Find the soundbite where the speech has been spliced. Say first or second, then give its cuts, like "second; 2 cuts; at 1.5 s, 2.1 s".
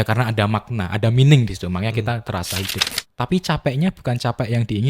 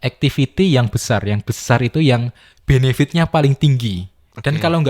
first; 1 cut; at 2.8 s